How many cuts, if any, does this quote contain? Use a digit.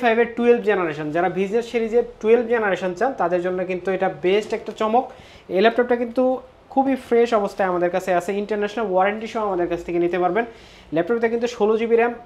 0